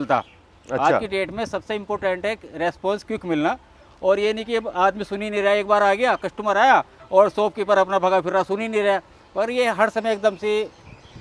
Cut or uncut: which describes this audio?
uncut